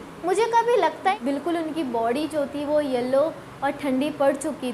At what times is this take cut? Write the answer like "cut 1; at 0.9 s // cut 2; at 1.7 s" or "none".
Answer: cut 1; at 1.2 s